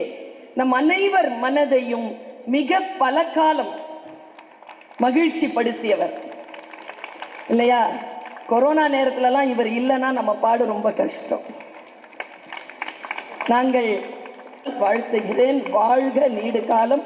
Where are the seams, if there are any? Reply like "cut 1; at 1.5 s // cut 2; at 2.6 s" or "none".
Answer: cut 1; at 14.7 s

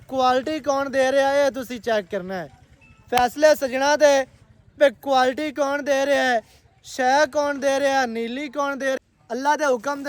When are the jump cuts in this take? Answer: cut 1; at 9.0 s

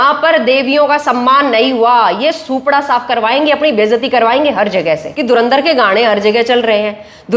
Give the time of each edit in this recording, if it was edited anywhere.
cut 1; at 5.1 s

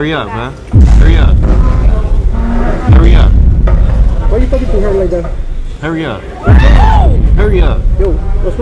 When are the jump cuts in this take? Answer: none

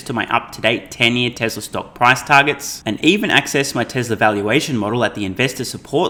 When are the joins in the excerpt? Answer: none

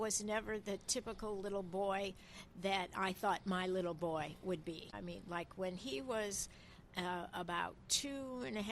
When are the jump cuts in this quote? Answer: cut 1; at 5.0 s

